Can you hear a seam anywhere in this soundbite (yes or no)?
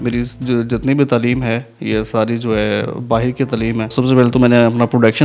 yes